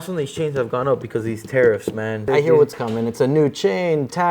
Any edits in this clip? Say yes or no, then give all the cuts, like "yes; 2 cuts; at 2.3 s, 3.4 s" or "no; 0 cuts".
yes; 1 cut; at 2.3 s